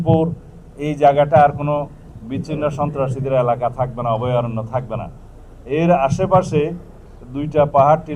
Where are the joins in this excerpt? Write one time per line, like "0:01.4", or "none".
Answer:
none